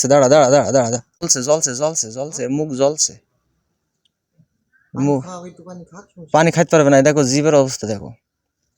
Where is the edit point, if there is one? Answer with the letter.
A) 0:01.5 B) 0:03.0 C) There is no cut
A